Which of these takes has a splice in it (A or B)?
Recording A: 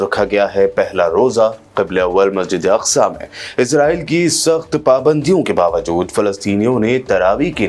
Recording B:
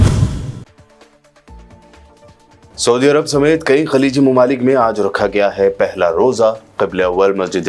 B